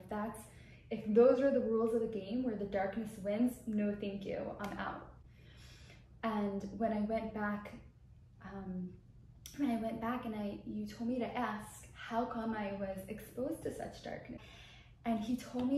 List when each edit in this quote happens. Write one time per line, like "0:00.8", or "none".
0:14.4